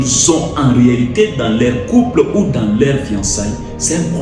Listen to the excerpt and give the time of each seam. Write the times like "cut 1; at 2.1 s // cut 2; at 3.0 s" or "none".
none